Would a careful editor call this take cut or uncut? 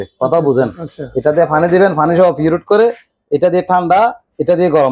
uncut